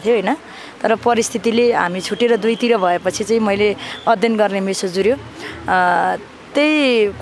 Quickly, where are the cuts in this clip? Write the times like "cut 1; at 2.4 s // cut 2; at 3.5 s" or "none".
none